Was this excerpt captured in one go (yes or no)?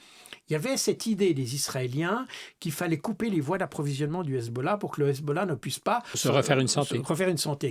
no